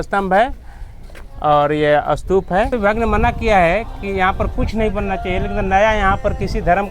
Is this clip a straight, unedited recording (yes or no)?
no